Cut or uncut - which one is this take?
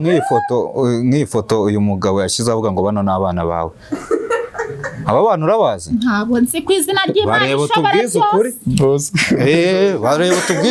uncut